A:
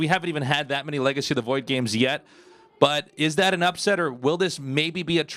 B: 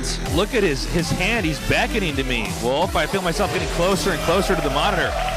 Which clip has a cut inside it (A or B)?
B